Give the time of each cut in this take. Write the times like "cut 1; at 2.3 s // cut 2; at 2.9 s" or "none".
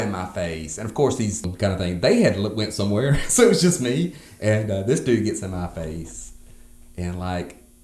cut 1; at 1.5 s